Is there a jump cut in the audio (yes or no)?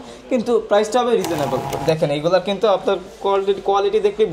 yes